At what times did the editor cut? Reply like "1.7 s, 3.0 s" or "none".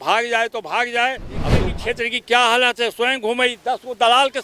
1.7 s